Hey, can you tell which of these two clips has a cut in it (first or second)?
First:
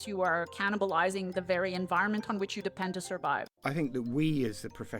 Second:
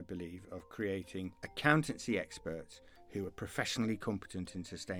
first